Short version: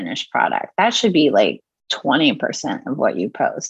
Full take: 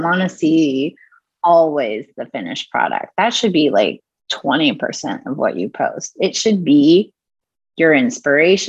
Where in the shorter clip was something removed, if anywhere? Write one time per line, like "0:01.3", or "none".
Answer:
none